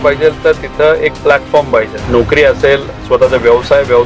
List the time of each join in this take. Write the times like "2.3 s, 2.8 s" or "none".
2.0 s